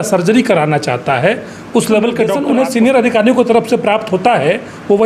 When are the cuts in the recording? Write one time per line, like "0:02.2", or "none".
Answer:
0:02.4